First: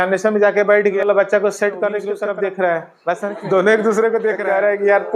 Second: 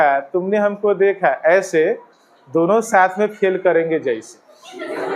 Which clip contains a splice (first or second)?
first